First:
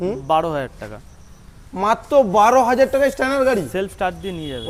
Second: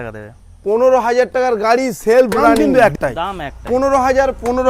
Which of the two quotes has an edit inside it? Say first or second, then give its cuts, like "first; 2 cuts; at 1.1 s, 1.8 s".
second; 1 cut; at 2.5 s